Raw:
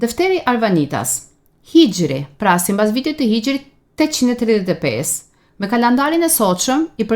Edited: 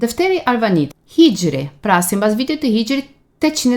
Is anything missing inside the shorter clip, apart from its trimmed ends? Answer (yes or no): yes